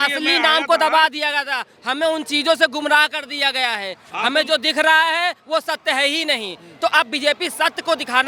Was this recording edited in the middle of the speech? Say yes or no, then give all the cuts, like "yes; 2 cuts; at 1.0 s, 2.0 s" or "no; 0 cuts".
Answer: no; 0 cuts